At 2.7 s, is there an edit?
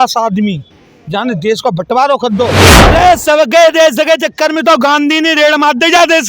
yes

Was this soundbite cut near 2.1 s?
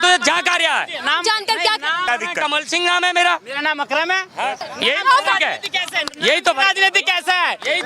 yes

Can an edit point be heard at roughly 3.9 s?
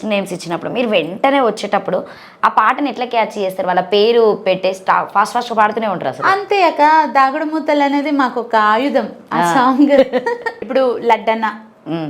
no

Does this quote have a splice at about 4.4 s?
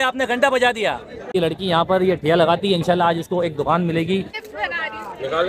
yes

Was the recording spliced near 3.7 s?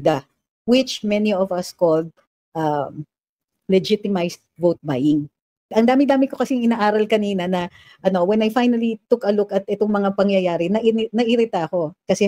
no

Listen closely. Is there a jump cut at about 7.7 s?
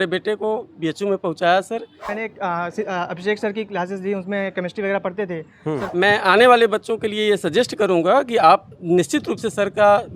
no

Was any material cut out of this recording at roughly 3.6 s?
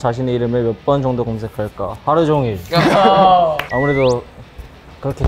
yes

